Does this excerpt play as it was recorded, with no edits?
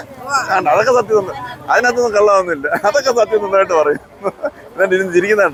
yes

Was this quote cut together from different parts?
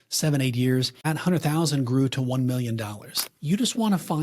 yes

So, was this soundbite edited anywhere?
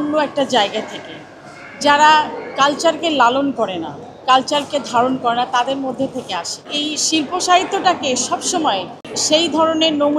yes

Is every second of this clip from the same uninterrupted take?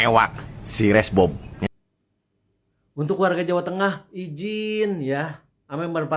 no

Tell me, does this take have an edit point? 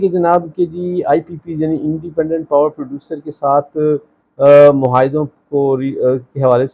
no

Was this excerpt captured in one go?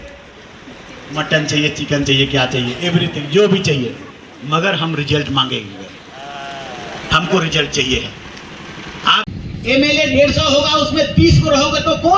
no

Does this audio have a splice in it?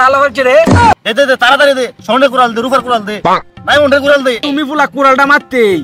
yes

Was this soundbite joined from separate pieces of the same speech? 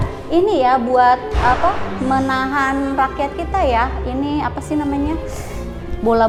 no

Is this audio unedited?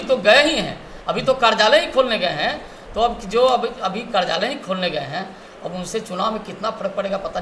yes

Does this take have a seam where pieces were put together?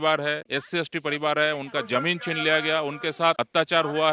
no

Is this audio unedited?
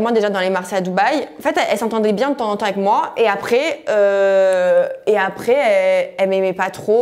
yes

